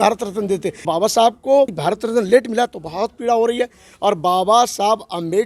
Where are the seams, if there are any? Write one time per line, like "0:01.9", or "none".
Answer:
0:00.8
0:01.8